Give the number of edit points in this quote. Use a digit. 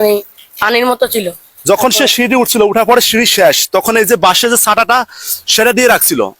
1